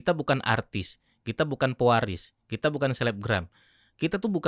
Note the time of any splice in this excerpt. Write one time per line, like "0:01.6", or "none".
none